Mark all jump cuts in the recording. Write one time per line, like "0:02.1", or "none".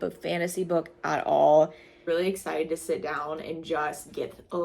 0:01.9